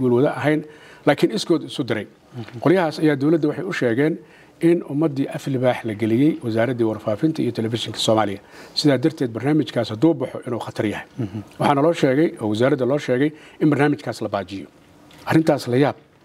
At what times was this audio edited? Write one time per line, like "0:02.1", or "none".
none